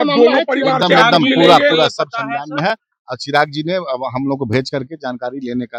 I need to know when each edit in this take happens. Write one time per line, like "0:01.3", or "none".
none